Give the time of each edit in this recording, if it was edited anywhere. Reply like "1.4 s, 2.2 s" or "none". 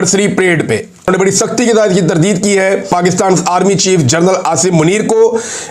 1.1 s, 2.9 s